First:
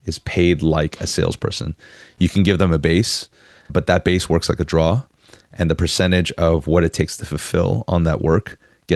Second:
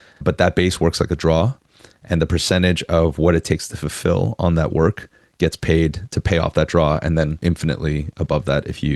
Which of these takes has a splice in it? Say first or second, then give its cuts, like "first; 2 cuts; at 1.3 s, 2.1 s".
second; 1 cut; at 7.3 s